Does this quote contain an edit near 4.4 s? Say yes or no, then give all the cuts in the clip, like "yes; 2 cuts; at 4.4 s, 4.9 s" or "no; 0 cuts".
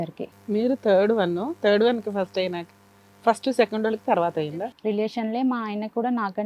yes; 1 cut; at 4.4 s